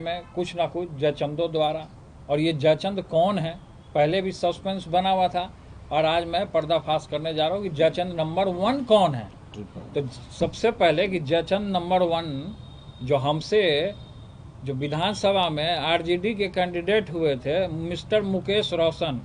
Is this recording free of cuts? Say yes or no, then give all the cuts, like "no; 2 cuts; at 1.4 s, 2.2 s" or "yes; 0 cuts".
yes; 0 cuts